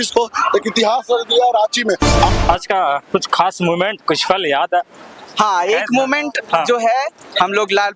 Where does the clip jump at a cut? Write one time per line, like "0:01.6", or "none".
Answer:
0:02.3